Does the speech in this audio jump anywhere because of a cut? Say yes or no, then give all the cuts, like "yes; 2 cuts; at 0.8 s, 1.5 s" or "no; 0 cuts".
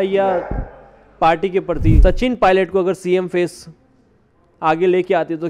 yes; 1 cut; at 2.0 s